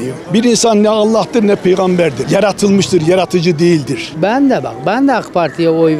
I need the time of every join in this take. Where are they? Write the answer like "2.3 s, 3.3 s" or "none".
4.0 s